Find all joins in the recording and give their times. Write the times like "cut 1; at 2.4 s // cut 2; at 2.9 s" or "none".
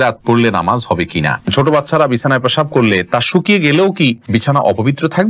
cut 1; at 1.5 s // cut 2; at 4.2 s